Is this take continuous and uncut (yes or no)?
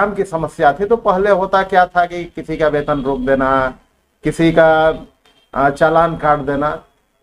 yes